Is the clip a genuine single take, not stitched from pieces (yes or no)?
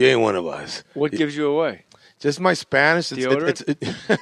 yes